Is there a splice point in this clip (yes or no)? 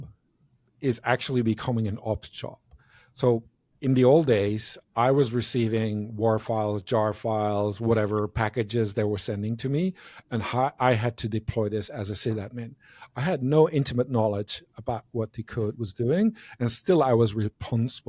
no